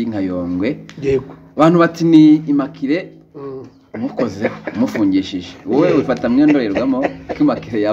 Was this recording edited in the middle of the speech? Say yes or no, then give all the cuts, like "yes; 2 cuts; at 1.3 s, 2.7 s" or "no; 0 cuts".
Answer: no; 0 cuts